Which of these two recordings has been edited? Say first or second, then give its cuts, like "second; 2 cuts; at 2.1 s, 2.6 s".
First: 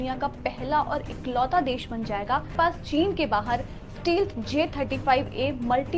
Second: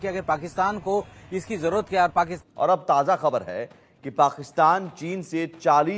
second; 1 cut; at 2.3 s